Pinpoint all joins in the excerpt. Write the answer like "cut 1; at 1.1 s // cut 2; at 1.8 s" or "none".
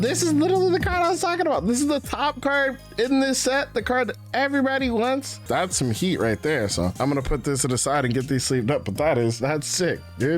cut 1; at 5.4 s // cut 2; at 9.4 s